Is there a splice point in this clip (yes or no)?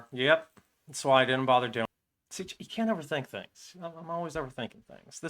yes